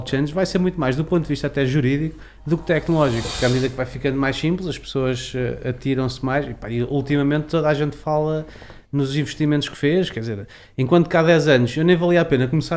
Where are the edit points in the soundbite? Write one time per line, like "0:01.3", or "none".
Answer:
0:03.3